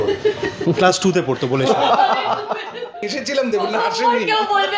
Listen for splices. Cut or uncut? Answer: cut